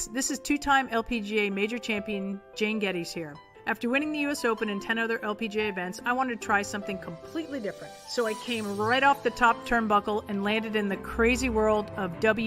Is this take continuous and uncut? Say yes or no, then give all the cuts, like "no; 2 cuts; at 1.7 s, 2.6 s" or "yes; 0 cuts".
yes; 0 cuts